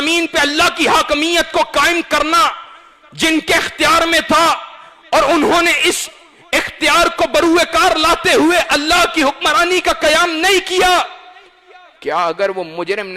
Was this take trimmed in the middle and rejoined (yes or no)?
no